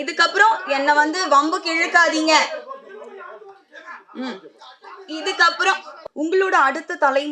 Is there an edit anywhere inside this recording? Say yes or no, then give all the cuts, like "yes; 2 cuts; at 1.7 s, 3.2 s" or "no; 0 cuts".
yes; 1 cut; at 6.0 s